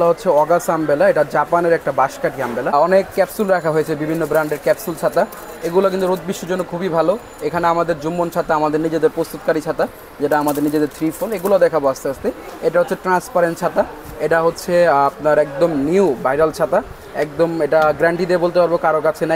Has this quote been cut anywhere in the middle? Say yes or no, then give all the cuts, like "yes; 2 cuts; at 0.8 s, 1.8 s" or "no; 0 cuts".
yes; 1 cut; at 2.7 s